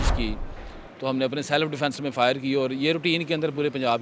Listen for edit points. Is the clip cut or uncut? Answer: uncut